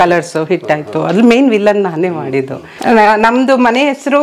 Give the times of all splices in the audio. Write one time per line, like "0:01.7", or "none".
0:02.7